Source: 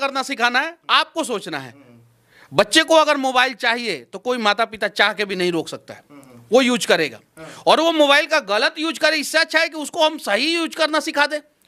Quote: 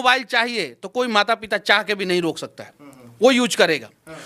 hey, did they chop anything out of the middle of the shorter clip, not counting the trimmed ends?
no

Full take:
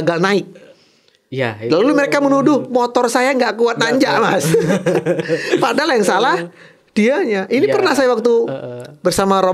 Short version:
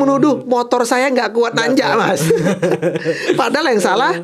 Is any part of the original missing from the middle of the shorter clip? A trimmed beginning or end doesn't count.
no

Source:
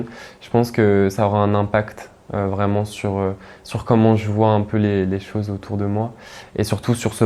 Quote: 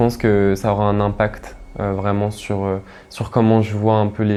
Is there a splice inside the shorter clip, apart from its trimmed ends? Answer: no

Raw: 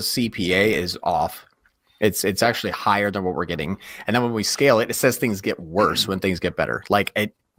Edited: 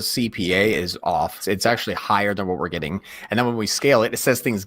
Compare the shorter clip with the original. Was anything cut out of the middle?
yes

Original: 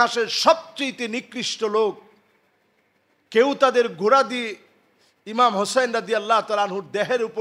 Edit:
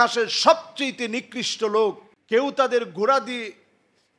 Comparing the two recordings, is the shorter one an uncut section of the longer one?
no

